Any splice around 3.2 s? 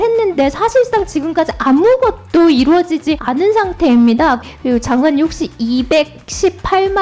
yes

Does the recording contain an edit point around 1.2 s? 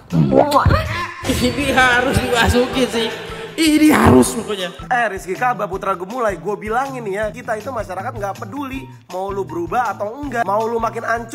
no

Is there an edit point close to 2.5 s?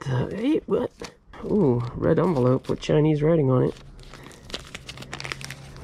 no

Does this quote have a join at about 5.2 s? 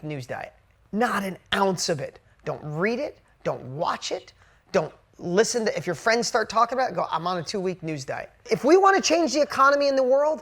no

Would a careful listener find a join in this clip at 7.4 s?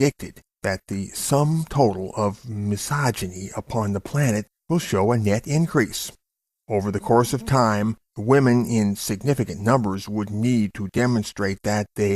yes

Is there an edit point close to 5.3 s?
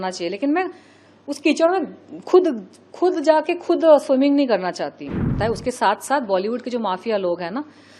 yes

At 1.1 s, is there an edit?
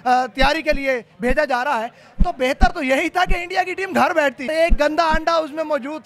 no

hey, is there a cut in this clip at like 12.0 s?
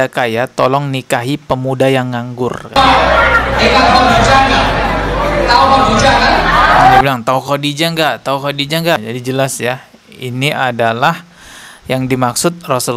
no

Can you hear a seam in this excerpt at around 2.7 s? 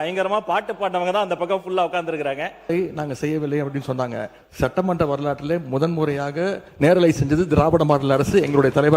yes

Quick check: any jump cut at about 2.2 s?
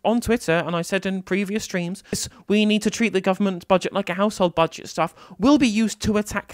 yes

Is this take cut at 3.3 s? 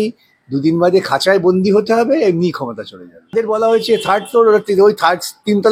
yes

